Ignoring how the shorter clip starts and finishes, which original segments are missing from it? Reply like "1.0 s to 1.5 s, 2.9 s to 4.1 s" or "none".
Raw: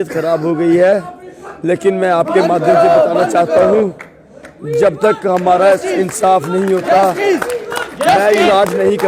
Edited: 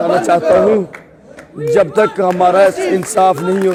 none

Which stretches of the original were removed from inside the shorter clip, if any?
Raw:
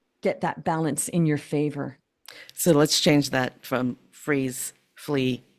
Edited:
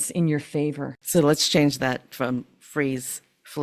1.9 s to 2.4 s

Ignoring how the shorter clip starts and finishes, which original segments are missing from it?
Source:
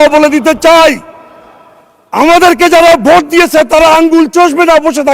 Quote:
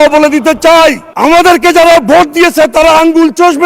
1.1 s to 2.0 s

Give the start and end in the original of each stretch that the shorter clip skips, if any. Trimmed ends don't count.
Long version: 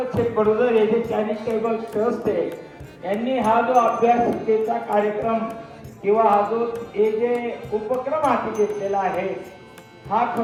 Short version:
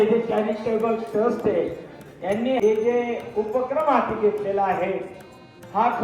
3.4 s to 6.9 s

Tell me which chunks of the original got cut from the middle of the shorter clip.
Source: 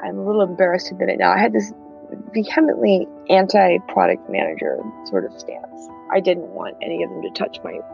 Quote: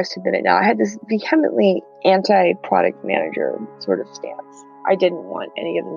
1.7 s to 2.2 s

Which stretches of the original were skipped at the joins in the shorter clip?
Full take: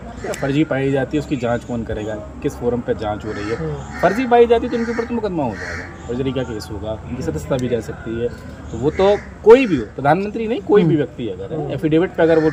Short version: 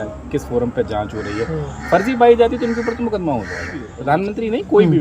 6.0 s to 9.9 s

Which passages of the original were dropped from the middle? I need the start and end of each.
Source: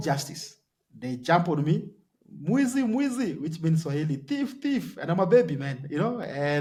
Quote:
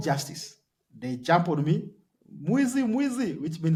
none

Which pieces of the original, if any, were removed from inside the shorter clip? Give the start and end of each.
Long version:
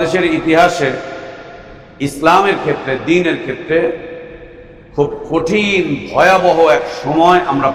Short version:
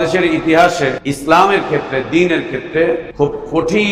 1.0 s to 1.9 s, 4.0 s to 4.9 s

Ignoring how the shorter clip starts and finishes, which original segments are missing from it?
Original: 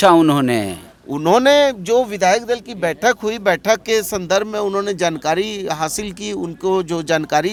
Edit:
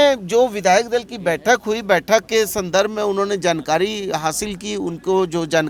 none

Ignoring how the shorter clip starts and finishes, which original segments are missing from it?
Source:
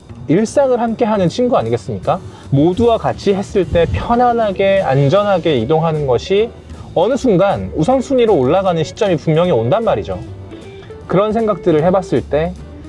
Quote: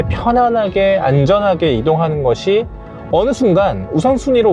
none

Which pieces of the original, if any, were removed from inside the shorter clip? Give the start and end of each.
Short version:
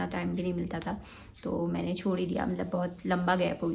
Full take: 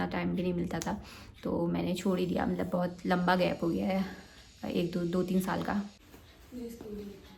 none

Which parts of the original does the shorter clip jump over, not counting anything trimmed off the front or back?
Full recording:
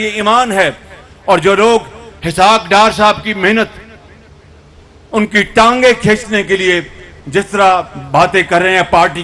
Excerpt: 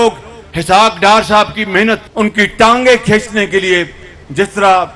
3.7 s to 5.0 s

